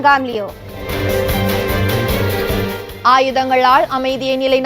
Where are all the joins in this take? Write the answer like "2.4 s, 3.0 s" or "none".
1.0 s, 2.9 s

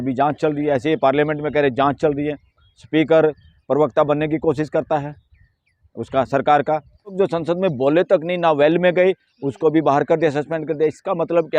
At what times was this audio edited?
7.1 s

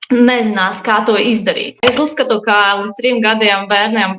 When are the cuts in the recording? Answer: 1.8 s

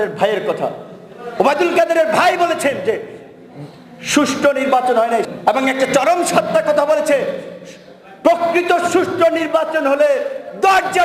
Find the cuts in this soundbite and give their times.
5.3 s

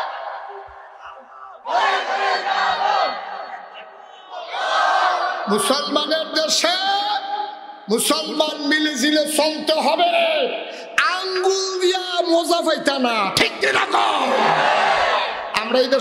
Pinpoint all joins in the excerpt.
none

